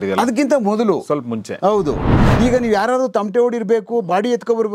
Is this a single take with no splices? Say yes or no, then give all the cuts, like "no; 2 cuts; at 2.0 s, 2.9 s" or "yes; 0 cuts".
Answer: no; 1 cut; at 2.1 s